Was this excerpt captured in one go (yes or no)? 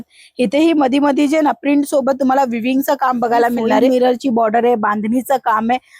no